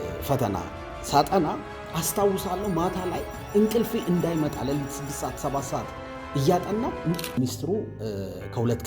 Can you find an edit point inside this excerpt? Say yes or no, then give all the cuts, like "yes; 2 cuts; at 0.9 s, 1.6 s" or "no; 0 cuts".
yes; 1 cut; at 7.4 s